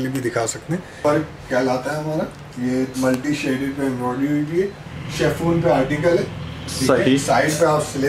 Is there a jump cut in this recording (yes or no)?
yes